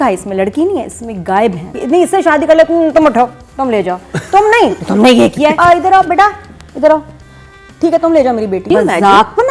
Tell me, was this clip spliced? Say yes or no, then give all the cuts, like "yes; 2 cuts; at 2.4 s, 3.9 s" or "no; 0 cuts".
yes; 3 cuts; at 1.7 s, 5.6 s, 8.7 s